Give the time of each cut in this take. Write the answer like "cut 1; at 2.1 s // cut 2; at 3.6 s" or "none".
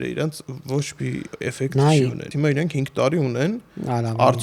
cut 1; at 2.3 s